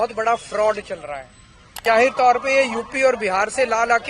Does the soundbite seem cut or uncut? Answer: cut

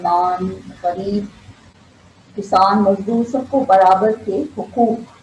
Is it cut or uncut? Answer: uncut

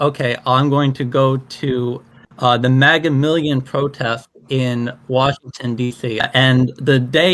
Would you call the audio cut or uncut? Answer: cut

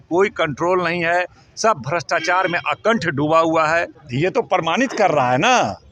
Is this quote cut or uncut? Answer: cut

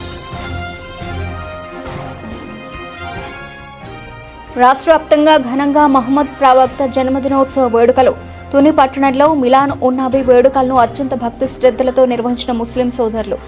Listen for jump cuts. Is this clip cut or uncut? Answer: uncut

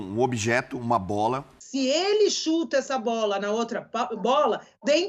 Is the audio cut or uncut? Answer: cut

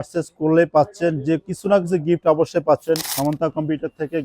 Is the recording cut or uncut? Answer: cut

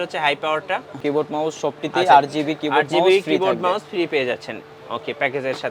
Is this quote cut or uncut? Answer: cut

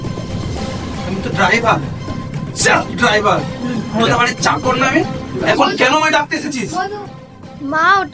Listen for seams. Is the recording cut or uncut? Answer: uncut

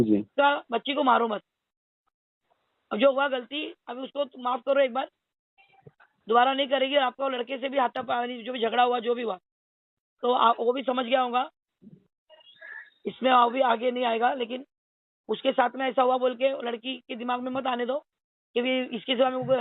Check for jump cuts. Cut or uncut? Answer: uncut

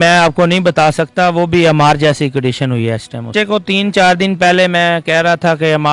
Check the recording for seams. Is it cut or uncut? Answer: cut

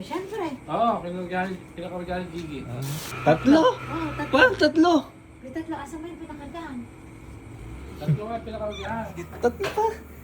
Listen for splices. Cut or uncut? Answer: cut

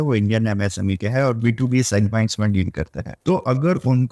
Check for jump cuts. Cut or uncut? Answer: cut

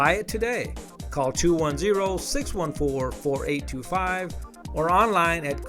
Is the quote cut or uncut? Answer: uncut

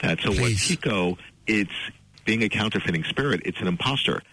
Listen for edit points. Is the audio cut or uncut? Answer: cut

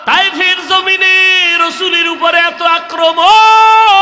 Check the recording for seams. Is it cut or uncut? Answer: uncut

